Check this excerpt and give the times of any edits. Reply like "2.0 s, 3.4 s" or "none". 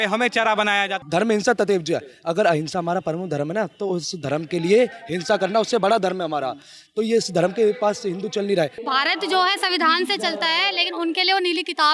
1.0 s, 8.8 s